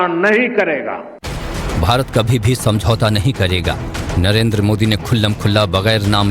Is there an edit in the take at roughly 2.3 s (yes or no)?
yes